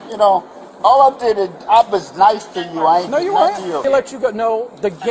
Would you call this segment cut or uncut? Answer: cut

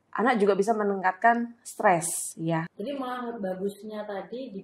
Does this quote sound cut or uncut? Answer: cut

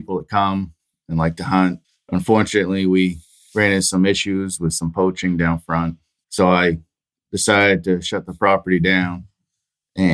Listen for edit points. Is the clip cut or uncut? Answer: cut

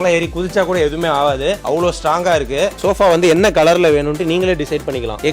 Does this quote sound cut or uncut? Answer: cut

